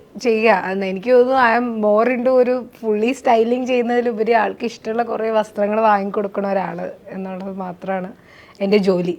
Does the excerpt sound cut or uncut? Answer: uncut